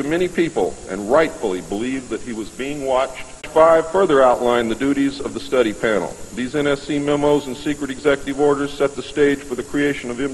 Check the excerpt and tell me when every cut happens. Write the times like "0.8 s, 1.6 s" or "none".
none